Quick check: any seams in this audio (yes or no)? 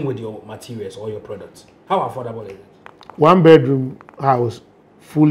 no